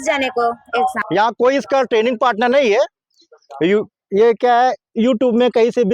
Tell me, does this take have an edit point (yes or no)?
yes